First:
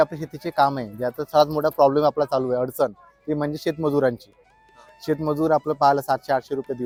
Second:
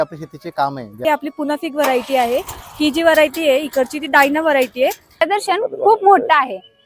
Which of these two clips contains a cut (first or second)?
second